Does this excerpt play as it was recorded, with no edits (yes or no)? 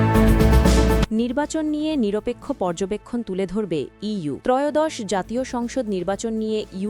no